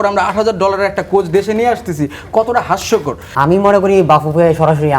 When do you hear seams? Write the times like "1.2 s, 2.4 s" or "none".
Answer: 3.2 s